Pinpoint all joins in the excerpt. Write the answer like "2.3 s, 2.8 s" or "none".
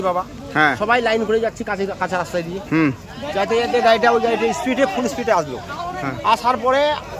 none